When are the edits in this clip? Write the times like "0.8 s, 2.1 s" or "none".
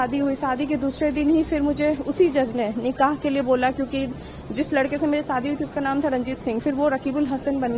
none